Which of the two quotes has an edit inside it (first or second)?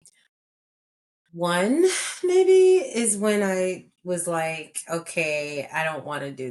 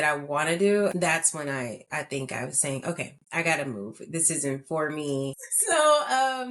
second